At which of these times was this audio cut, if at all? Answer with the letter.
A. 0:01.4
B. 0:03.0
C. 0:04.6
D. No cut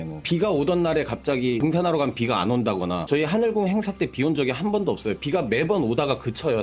B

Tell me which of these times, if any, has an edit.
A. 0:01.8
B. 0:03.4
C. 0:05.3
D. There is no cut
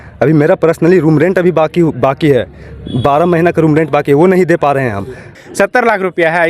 C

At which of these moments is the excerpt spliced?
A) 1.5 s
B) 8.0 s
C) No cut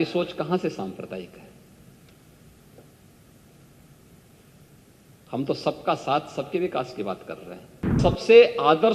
B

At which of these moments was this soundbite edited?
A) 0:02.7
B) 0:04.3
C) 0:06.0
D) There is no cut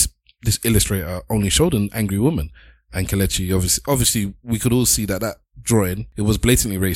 C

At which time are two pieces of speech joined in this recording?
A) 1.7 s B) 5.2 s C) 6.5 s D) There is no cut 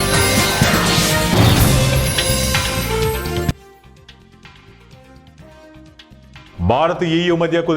C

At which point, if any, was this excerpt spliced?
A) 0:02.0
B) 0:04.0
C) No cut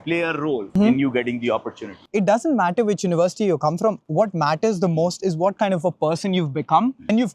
A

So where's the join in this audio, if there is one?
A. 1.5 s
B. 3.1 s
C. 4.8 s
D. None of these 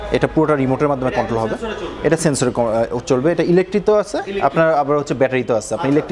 D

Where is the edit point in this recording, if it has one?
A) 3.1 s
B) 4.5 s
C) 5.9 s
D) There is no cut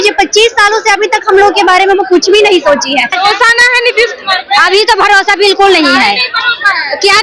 A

